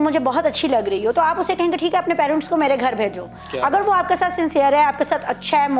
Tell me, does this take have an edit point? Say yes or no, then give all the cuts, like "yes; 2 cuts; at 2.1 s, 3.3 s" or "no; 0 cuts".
no; 0 cuts